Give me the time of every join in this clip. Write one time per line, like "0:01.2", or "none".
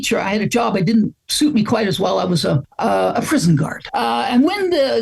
0:02.7
0:03.8